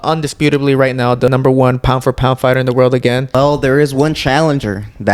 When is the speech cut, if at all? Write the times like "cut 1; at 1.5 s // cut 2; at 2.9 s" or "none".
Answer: cut 1; at 1.3 s // cut 2; at 3.3 s